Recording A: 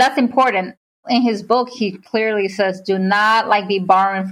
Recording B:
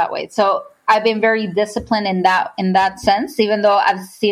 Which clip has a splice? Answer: A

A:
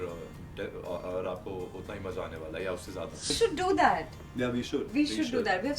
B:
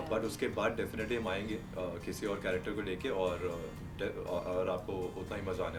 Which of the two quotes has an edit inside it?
A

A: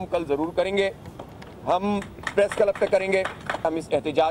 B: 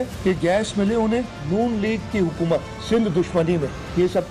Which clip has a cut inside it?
A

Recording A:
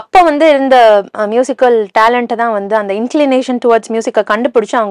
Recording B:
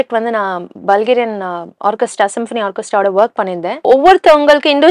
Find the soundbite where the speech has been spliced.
B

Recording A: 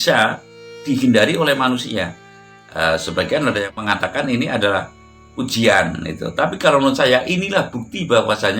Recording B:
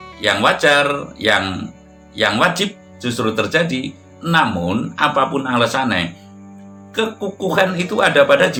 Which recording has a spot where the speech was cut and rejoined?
A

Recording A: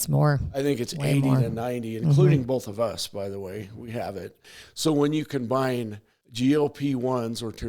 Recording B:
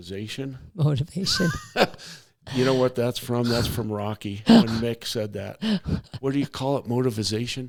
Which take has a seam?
A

